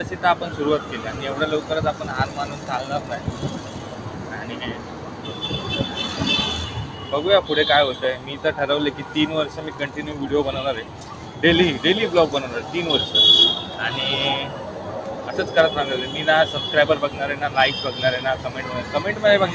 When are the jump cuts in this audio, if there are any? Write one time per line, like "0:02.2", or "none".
none

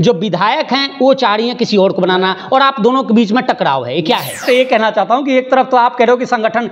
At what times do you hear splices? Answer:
0:04.4

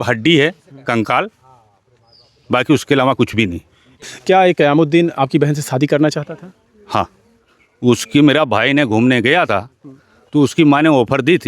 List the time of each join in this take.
0:04.1

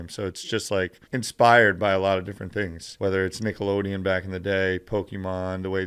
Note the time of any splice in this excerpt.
0:01.0
0:02.8

